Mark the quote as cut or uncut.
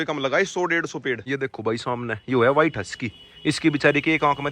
cut